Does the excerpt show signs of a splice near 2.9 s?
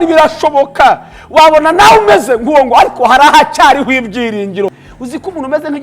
no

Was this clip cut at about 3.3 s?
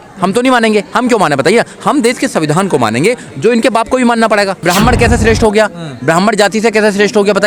no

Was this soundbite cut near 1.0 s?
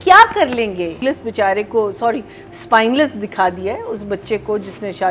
yes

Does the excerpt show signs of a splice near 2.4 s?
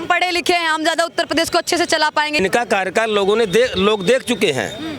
yes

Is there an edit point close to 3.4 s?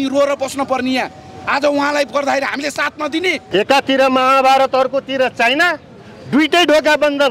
yes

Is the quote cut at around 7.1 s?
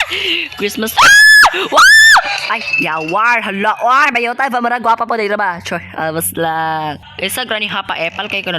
yes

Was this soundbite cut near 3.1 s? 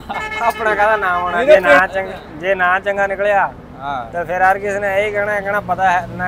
no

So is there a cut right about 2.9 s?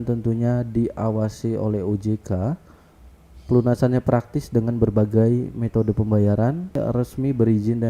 no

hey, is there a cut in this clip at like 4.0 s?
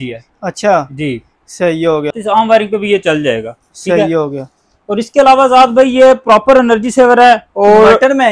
no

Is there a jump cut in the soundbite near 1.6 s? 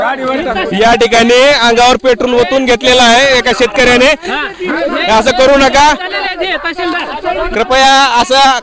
no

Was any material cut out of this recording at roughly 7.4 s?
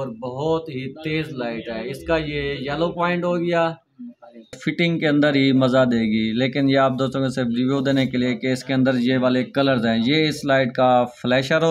no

